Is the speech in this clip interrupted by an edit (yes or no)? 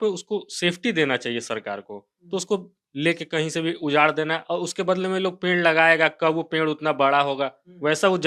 no